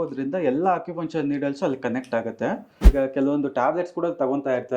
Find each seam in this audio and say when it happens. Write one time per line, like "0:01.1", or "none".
0:02.9